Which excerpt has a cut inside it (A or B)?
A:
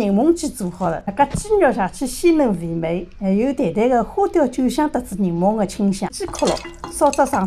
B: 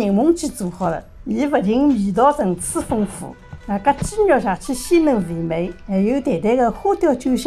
A